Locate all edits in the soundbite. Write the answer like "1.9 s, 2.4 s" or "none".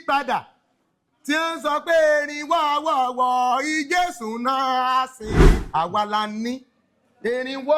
5.6 s